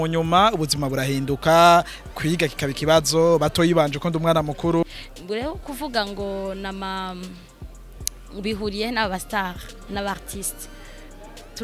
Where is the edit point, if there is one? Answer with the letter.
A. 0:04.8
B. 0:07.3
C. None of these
A